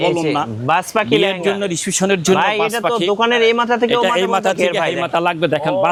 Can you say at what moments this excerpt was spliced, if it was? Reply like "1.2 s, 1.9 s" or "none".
none